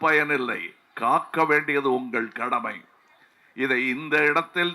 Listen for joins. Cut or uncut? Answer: uncut